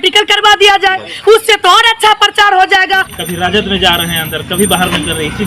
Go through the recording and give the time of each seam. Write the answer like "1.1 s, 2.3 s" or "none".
3.1 s